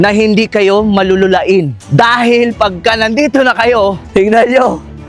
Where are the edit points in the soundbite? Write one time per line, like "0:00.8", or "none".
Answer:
0:01.8
0:04.0